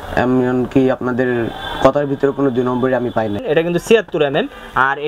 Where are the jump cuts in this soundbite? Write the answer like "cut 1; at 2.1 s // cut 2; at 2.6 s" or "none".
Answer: cut 1; at 3.4 s

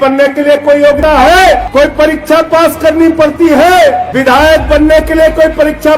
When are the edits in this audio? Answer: cut 1; at 1.0 s // cut 2; at 1.6 s // cut 3; at 4.1 s

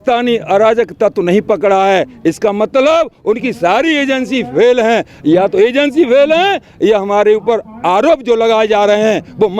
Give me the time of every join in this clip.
none

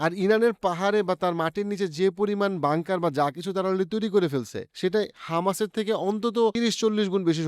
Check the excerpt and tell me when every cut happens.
cut 1; at 6.5 s

